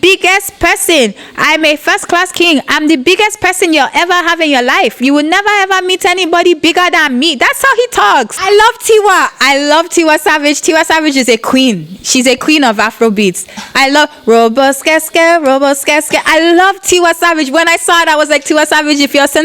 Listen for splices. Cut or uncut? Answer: cut